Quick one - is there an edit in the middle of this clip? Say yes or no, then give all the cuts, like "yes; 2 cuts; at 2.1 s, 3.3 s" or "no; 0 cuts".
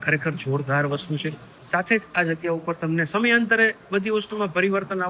no; 0 cuts